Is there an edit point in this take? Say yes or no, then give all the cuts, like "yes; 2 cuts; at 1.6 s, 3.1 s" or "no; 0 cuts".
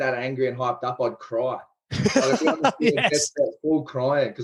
no; 0 cuts